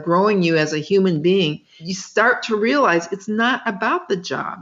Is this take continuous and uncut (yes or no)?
no